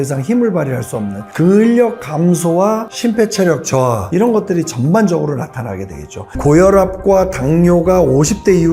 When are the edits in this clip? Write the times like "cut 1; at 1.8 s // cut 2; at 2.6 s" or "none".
cut 1; at 4.0 s // cut 2; at 6.4 s

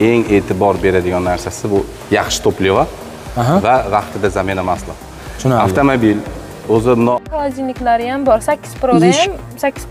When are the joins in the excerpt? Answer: cut 1; at 7.3 s

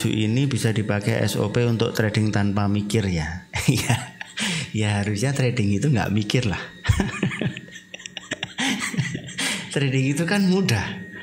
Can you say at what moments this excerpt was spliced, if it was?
none

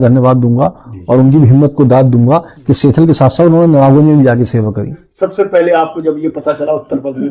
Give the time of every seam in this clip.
cut 1; at 5.1 s

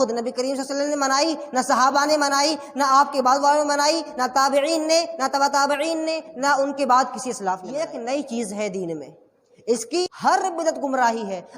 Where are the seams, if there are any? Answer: cut 1; at 7.9 s // cut 2; at 10.0 s

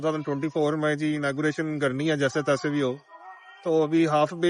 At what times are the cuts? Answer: none

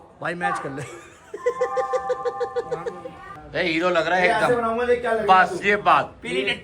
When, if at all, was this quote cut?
cut 1; at 3.3 s

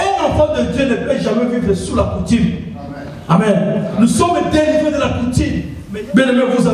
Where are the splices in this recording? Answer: cut 1; at 5.7 s

